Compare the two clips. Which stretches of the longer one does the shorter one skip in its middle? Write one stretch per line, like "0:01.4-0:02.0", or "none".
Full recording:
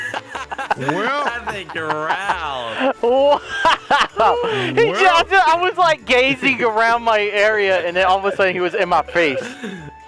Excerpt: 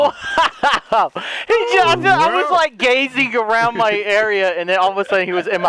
none